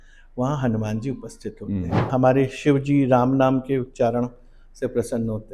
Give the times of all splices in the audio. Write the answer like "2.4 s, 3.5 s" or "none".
2.1 s